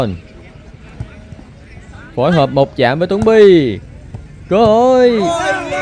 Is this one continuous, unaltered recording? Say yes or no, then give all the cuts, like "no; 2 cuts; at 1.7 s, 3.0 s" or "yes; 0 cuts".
yes; 0 cuts